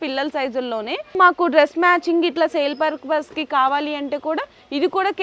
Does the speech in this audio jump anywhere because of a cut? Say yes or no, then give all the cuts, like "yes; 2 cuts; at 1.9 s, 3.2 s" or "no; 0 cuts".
yes; 1 cut; at 1.1 s